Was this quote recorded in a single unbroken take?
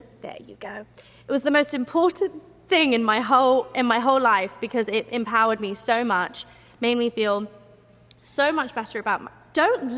yes; 0 cuts

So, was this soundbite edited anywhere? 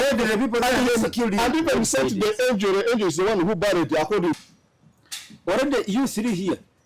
yes; 1 cut; at 4.4 s

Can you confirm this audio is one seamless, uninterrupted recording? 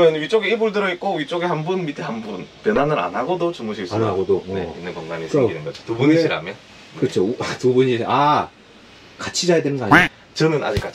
yes; 0 cuts

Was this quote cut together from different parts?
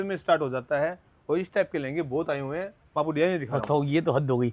no; 0 cuts

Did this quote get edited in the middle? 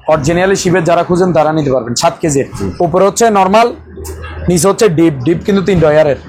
yes; 1 cut; at 2.6 s

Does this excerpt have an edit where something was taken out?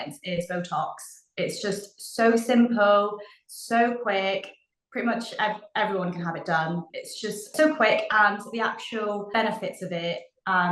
yes; 2 cuts; at 6.9 s, 9.3 s

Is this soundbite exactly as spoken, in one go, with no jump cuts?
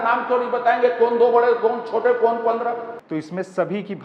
no; 1 cut; at 2.9 s

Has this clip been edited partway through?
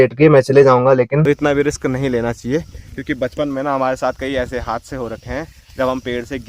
yes; 1 cut; at 1.2 s

